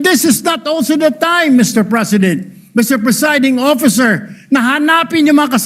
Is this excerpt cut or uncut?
uncut